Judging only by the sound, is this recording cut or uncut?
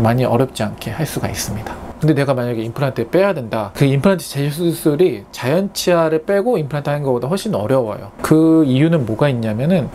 cut